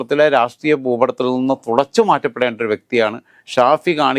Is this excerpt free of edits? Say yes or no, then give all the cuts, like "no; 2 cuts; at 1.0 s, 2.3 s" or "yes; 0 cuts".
yes; 0 cuts